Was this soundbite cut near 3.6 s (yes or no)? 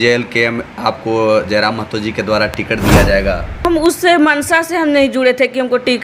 yes